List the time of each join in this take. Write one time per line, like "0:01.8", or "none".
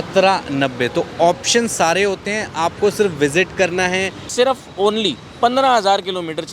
0:04.2

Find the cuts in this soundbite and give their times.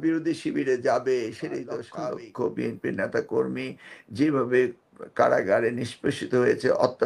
0:01.9

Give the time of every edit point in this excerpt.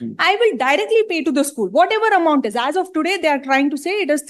none

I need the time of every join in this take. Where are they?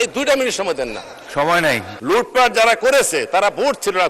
0:01.9

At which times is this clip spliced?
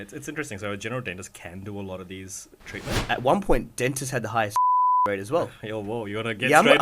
0:03.0

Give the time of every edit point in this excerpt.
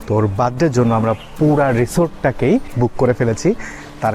0:02.7

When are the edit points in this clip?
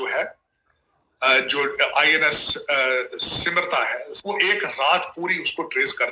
0:04.1

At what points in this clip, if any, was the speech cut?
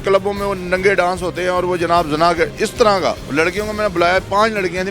0:03.2

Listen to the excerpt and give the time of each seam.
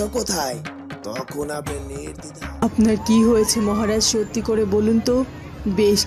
0:02.6

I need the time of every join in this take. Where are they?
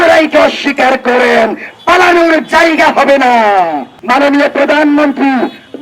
0:03.9

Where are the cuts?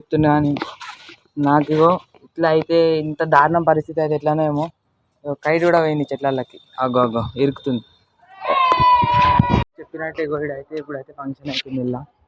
0:09.7

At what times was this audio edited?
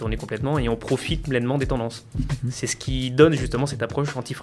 none

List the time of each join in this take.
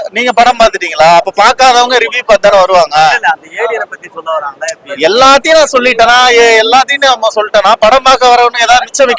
none

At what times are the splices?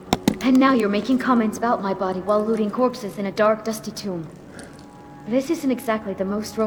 none

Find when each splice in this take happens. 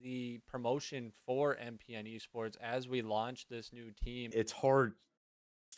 0:04.3

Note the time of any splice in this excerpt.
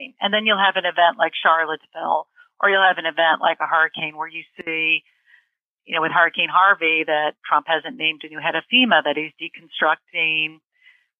none

